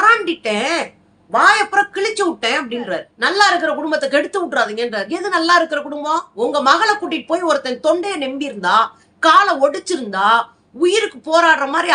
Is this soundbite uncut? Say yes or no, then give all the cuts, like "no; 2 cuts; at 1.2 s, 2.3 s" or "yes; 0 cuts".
no; 2 cuts; at 3.1 s, 6.3 s